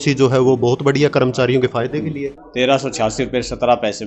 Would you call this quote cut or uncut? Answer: cut